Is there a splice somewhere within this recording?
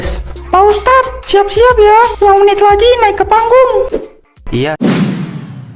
yes; 1 cut; at 4.7 s

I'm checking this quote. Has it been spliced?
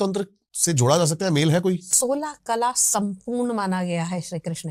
no; 0 cuts

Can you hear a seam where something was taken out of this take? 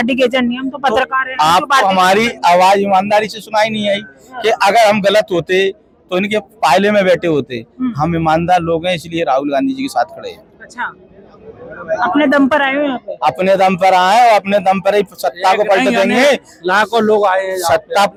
no; 0 cuts

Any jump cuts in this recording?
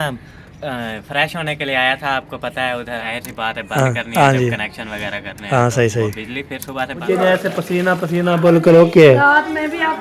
yes; 2 cuts; at 3.1 s, 7.0 s

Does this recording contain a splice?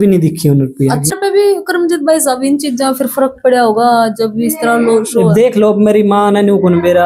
yes; 1 cut; at 1.1 s

